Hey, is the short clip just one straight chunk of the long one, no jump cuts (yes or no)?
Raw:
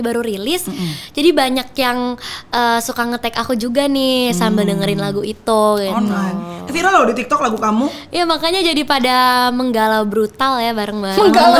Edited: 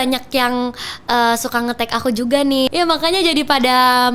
no